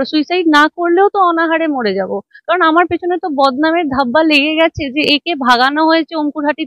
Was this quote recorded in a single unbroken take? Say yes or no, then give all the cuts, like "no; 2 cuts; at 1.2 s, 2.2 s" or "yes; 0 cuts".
yes; 0 cuts